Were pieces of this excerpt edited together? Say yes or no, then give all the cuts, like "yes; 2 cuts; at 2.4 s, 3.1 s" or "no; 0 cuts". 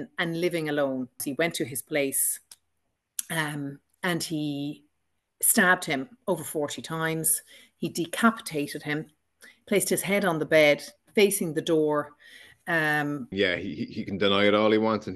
yes; 2 cuts; at 1.2 s, 13.3 s